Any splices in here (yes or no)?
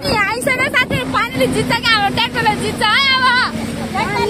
no